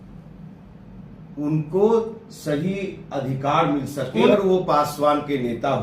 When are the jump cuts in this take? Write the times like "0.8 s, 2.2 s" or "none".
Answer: 4.3 s